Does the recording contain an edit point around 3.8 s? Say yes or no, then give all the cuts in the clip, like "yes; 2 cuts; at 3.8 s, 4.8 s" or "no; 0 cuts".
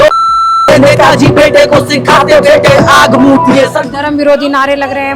yes; 1 cut; at 3.8 s